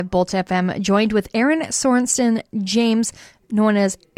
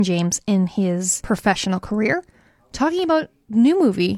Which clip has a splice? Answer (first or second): second